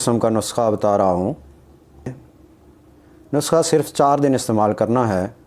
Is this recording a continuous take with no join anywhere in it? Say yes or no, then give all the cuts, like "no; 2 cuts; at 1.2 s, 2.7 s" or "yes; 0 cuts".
no; 1 cut; at 2.1 s